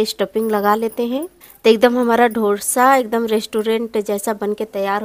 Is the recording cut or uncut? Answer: cut